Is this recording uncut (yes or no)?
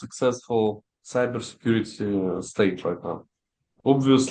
yes